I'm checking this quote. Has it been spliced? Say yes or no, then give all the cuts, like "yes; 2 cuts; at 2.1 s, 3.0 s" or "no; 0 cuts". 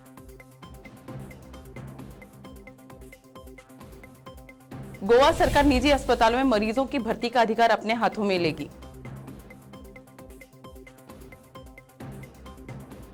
no; 0 cuts